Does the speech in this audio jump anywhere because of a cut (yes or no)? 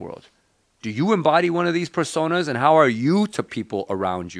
no